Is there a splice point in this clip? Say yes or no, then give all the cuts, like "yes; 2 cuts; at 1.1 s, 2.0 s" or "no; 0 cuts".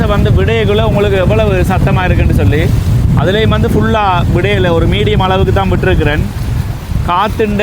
no; 0 cuts